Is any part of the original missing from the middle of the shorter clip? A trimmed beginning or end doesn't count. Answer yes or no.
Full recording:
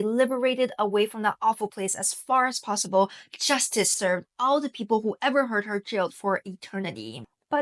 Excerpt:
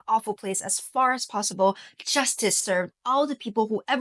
no